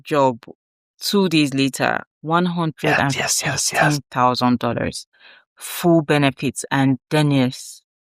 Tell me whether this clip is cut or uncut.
uncut